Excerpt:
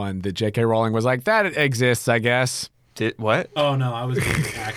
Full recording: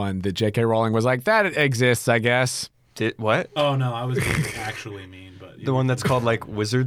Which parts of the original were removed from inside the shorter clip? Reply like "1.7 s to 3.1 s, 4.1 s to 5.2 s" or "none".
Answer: none